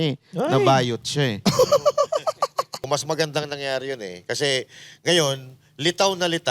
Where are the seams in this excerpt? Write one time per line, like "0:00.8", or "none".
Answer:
0:02.9